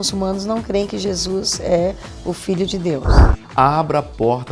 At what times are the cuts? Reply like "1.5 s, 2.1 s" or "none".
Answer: 3.1 s